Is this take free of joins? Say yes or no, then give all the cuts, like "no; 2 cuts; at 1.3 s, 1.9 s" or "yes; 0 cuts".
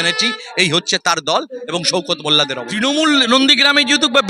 no; 1 cut; at 2.6 s